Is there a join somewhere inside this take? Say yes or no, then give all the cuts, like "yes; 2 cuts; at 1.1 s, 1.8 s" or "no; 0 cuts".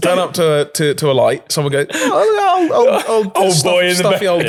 no; 0 cuts